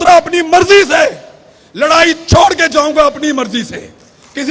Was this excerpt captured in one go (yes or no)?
yes